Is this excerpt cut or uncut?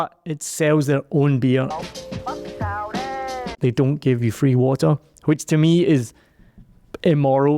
cut